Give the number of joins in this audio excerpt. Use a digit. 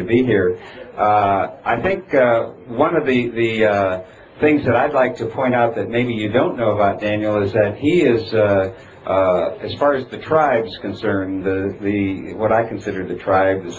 1